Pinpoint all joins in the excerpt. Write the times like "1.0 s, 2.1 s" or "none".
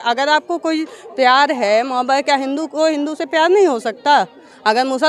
none